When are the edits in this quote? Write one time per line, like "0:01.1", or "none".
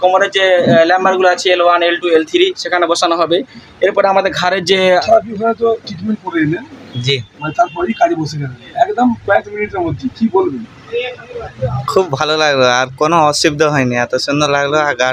0:05.0